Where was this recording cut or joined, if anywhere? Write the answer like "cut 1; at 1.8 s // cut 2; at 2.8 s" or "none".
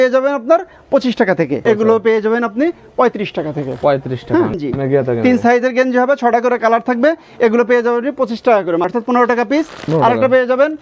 cut 1; at 1.6 s // cut 2; at 4.6 s // cut 3; at 8.9 s